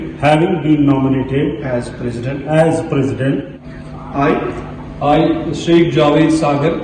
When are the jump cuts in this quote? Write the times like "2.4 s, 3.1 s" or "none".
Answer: 3.6 s